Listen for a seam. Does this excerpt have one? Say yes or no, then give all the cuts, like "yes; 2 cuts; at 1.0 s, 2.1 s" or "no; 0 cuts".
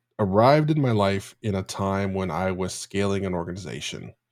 no; 0 cuts